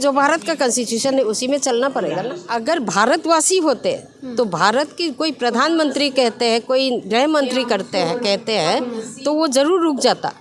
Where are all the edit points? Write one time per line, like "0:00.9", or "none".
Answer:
0:02.4